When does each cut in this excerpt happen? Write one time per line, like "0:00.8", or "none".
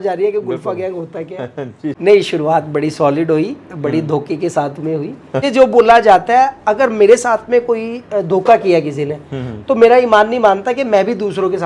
0:02.0
0:05.4